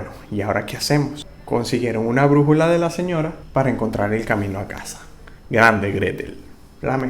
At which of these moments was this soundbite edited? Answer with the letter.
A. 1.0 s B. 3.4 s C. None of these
B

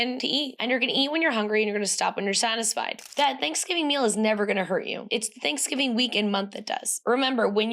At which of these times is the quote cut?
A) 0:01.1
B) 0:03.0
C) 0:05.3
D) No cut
B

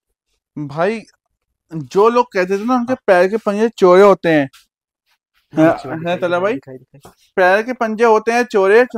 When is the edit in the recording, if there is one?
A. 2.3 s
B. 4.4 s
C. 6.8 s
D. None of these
D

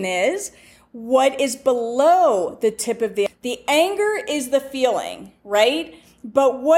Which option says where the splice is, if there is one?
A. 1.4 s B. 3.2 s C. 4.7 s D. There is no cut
B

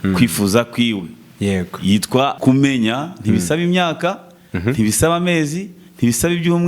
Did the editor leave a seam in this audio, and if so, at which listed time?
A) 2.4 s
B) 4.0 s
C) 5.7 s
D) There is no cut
A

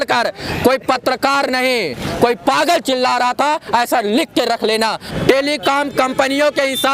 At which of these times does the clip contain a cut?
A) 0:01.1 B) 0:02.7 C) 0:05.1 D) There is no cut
C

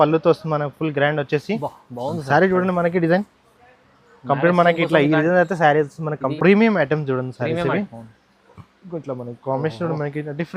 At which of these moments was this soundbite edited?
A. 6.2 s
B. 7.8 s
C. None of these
A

